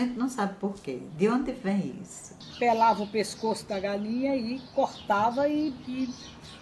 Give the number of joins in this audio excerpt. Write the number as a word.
one